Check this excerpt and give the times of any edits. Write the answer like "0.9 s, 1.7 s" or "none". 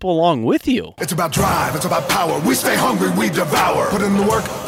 1.4 s